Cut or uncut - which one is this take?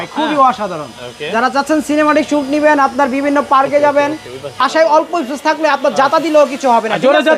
cut